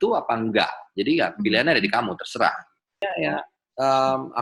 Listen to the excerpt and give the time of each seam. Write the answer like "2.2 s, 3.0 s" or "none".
2.9 s

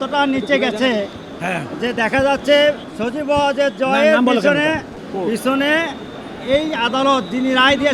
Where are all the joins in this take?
2.9 s, 5.0 s

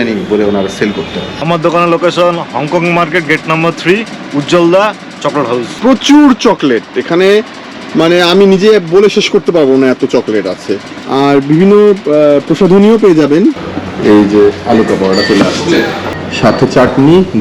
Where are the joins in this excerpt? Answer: 1.4 s, 5.7 s, 11.0 s, 13.6 s

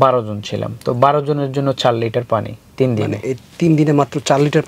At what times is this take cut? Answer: none

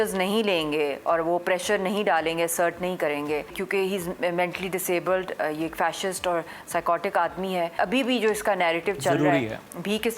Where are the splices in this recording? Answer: 3.6 s, 7.7 s

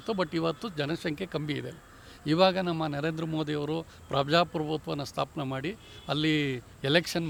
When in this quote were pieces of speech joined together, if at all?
none

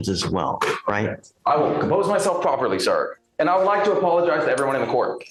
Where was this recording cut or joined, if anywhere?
none

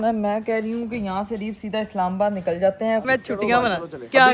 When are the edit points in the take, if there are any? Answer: 3.0 s

